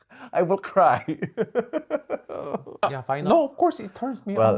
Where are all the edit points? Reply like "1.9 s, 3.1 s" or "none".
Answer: 2.8 s